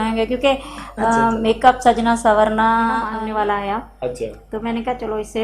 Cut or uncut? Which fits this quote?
cut